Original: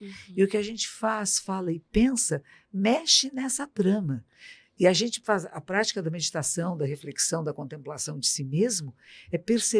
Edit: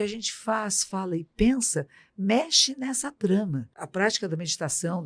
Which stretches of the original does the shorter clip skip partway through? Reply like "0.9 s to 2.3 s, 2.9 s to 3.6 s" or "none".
4.4 s to 5.5 s

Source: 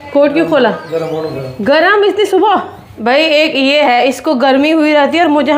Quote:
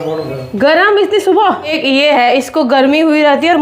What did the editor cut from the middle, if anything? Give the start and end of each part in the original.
2.8 s to 3.5 s

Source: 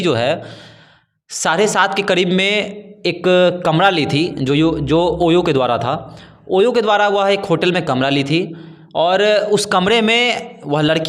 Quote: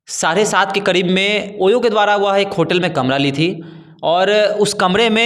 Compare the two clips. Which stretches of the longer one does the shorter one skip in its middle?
2.7 s to 6.4 s

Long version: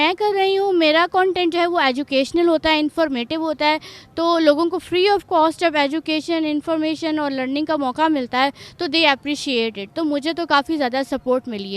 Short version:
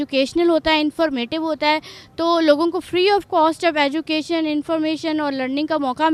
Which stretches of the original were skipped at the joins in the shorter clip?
none

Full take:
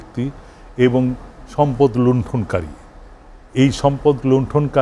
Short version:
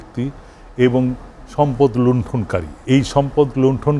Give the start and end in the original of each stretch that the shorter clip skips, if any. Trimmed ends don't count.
2.7 s to 3.4 s

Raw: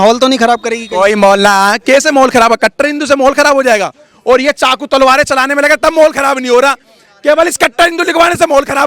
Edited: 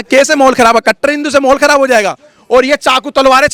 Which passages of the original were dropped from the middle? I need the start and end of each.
none

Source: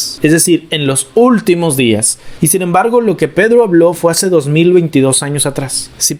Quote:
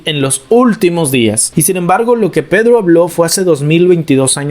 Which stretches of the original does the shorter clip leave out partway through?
2.1 s to 2.3 s

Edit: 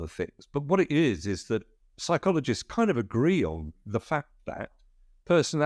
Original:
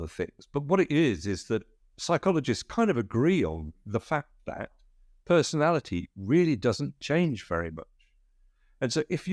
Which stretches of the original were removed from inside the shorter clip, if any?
none

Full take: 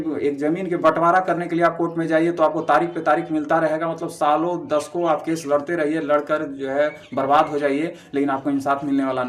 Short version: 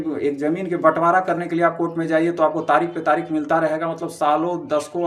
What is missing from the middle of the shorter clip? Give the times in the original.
none

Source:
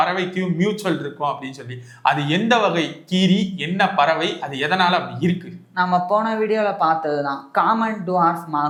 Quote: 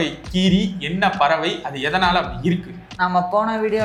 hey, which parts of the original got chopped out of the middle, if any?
none

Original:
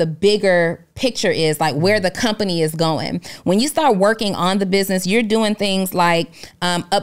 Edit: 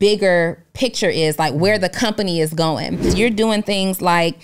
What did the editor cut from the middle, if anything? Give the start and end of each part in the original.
3.3 s to 5.0 s

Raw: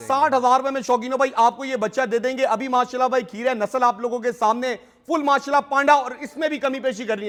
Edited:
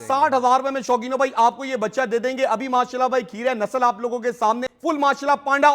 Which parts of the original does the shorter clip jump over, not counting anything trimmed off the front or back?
4.7 s to 4.9 s

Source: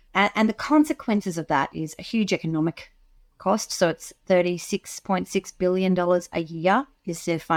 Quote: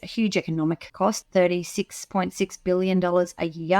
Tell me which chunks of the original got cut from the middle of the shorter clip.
3.1 s to 4.1 s

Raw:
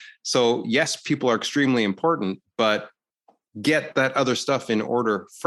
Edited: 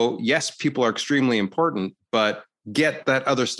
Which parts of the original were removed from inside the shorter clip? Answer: 3.0 s to 3.4 s

